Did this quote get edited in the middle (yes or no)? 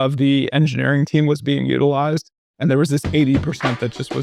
no